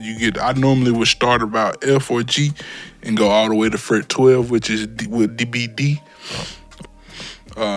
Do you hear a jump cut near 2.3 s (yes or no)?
no